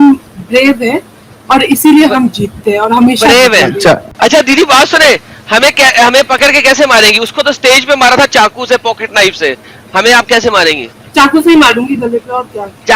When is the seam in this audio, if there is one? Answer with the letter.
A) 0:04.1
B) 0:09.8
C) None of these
A